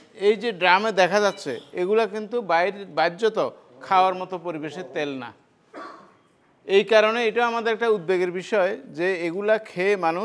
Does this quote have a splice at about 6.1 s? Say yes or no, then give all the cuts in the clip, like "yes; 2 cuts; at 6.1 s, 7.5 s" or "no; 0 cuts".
no; 0 cuts